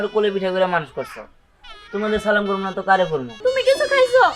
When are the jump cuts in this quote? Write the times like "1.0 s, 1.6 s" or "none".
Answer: 3.3 s